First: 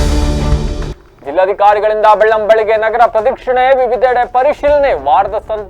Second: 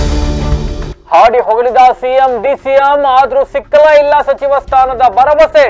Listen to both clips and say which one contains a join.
first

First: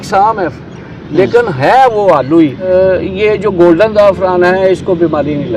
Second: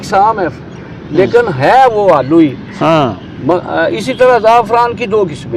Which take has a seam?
first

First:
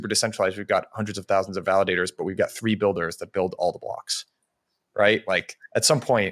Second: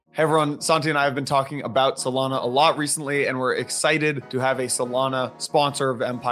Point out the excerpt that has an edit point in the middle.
second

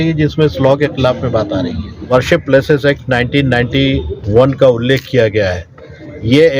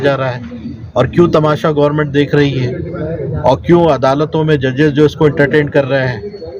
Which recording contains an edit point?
first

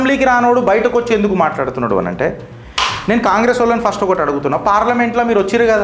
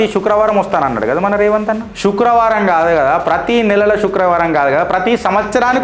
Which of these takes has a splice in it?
second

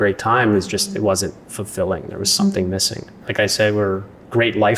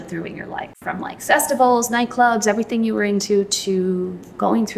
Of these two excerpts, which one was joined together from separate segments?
first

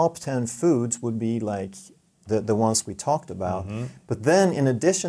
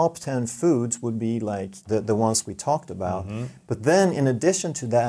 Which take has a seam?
second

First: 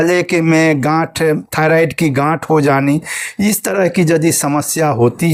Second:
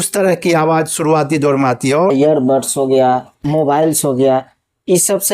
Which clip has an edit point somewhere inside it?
second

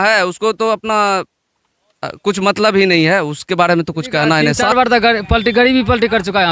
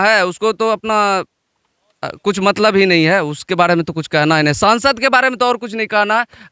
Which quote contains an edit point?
first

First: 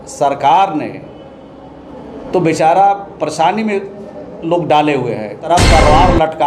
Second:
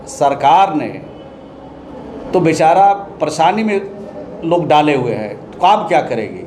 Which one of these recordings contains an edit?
first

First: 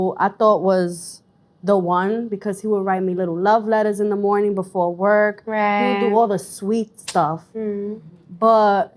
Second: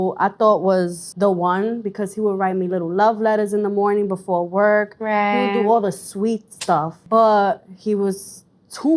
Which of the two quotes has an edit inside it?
second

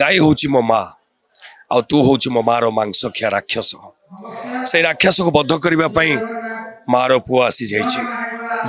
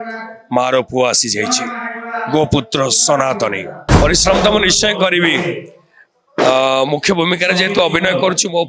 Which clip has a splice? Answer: second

